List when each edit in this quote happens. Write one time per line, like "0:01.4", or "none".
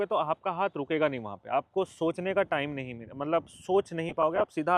none